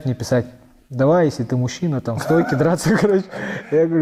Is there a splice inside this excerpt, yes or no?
no